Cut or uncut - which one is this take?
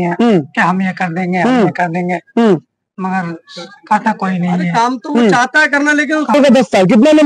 cut